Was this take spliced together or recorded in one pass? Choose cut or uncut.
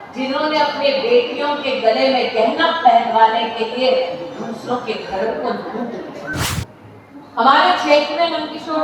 cut